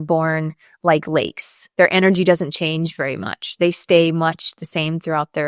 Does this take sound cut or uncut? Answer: uncut